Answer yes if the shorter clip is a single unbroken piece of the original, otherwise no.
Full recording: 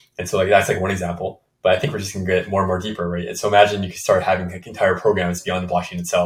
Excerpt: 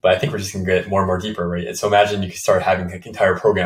yes